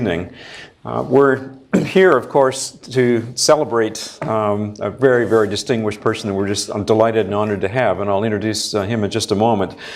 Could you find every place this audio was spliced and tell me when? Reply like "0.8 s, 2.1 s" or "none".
none